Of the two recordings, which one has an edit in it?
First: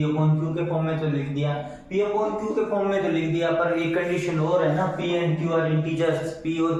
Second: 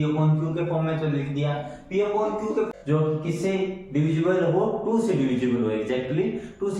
second; 1 cut; at 2.7 s

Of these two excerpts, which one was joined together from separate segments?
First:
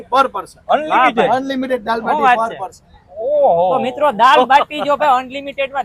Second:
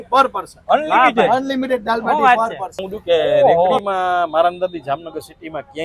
second; 1 cut; at 3.8 s

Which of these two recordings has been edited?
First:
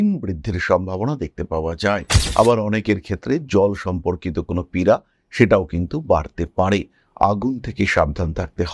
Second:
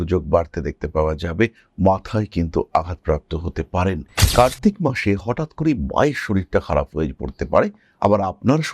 second; 1 cut; at 4.2 s

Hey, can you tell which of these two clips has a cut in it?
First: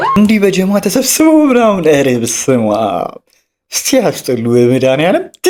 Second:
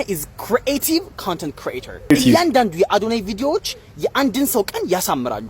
second; 1 cut; at 2.1 s

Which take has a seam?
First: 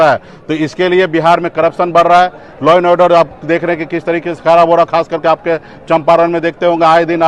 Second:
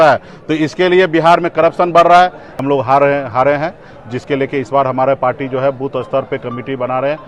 second; 1 cut; at 2.5 s

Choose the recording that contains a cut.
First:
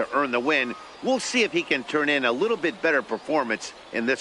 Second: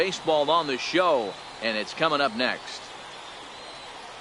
second; 1 cut; at 2.6 s

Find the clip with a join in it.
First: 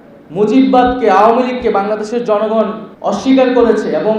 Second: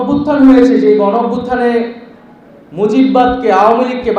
first; 1 cut; at 2.9 s

